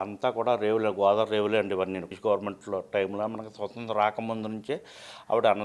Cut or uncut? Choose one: cut